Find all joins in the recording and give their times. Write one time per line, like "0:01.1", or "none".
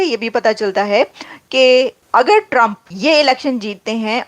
0:02.0
0:02.9